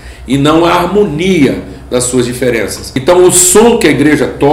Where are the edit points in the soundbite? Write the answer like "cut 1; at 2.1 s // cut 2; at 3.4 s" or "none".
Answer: cut 1; at 2.9 s